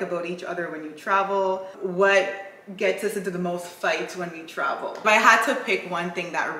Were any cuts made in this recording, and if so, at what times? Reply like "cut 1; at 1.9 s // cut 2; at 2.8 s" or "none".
cut 1; at 1.7 s // cut 2; at 5.0 s